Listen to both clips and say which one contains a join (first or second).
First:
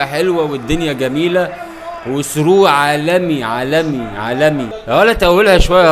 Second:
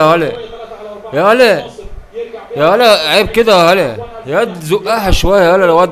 first